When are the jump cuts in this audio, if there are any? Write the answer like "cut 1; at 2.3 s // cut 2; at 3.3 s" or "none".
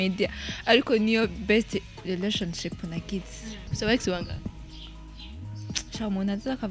cut 1; at 3.6 s